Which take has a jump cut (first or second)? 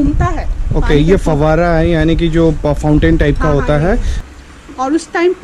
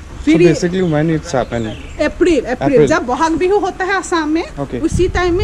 first